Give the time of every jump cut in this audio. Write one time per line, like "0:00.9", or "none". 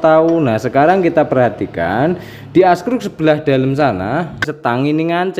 0:04.5